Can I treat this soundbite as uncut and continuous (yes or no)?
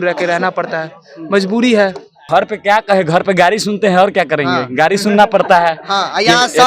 no